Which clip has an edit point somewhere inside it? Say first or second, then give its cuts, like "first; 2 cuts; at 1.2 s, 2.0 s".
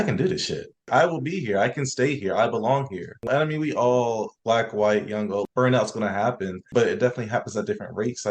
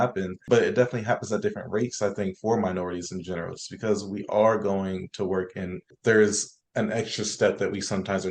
first; 1 cut; at 3.3 s